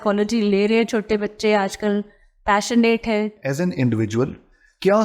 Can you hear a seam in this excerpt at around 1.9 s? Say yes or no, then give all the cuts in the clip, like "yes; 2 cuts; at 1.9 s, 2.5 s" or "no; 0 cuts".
no; 1 cut; at 3.4 s